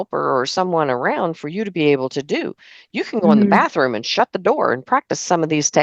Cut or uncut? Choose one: uncut